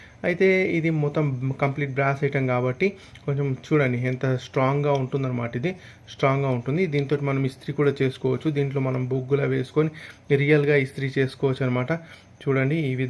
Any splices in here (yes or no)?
no